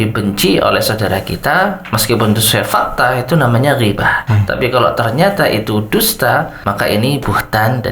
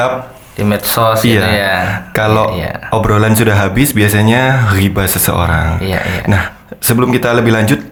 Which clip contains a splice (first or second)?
first